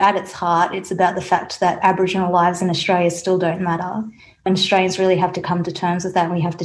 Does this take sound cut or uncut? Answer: cut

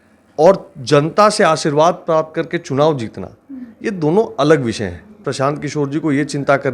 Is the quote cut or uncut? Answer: cut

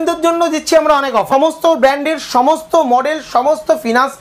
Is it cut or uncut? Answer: cut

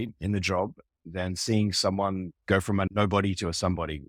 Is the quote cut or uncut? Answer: uncut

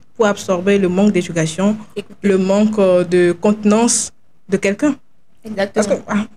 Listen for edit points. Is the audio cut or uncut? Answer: uncut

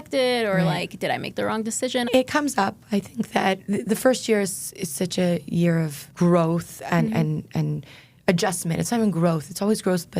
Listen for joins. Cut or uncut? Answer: cut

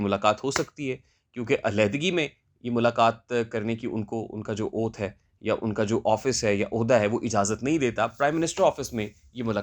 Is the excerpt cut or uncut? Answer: uncut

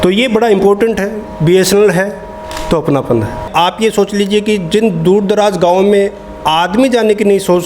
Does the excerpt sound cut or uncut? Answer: cut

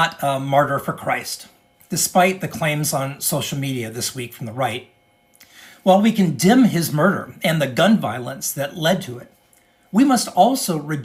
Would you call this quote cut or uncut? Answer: uncut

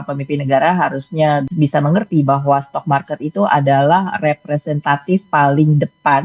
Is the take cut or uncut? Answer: cut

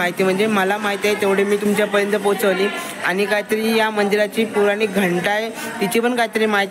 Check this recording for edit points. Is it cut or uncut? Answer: uncut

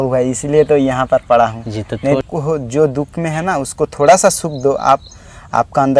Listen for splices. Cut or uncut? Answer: cut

